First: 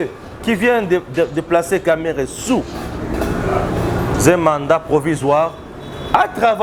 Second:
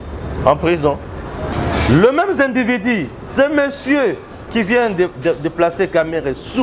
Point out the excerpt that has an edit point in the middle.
second; 1 cut; at 1.5 s

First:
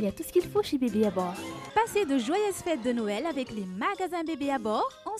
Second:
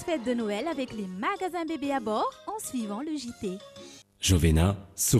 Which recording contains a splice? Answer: second; 1 cut; at 4.1 s

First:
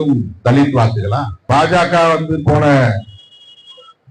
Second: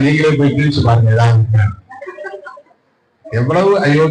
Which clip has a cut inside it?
first; 1 cut; at 1.3 s

